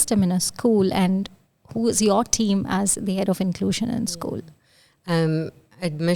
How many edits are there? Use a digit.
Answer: 0